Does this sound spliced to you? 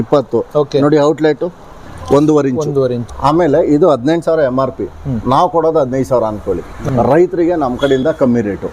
yes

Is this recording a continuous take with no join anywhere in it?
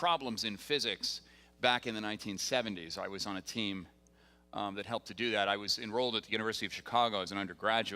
no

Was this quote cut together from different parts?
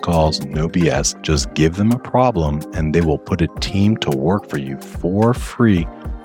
yes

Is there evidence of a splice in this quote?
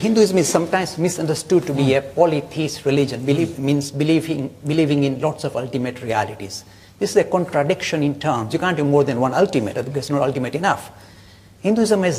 yes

